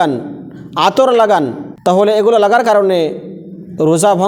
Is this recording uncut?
no; 1 cut; at 1.7 s

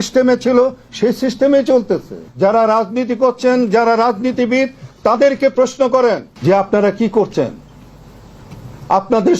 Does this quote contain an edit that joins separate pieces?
yes; 2 cuts; at 2.3 s, 6.3 s

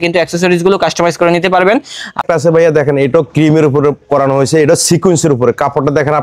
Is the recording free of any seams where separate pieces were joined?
no; 1 cut; at 2.2 s

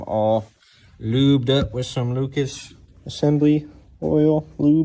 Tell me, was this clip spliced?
no; 0 cuts

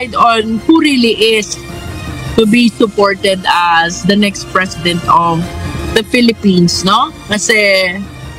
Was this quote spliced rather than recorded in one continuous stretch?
no; 0 cuts

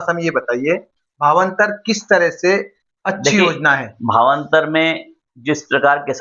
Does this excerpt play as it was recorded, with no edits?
yes; 0 cuts

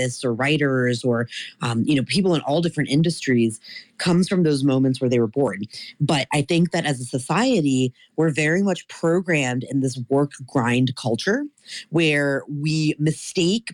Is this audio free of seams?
yes; 0 cuts

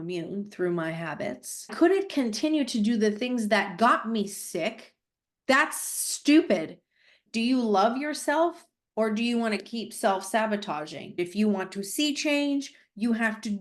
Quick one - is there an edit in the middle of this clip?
yes; 3 cuts; at 1.7 s, 7.2 s, 11.1 s

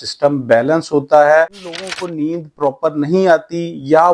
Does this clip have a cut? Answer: yes; 1 cut; at 1.8 s

